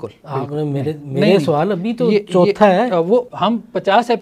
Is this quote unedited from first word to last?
no; 1 cut; at 3.3 s

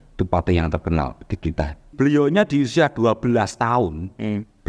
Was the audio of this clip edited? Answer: yes; 1 cut; at 1.9 s

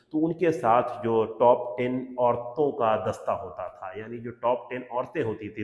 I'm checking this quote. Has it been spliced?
no; 0 cuts

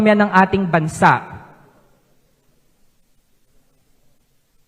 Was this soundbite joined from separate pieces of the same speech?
no; 0 cuts

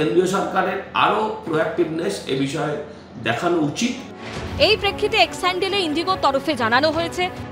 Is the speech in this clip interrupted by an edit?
no; 0 cuts

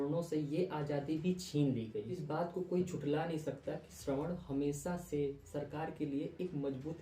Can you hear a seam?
no; 0 cuts

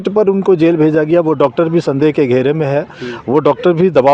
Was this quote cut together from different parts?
no; 0 cuts

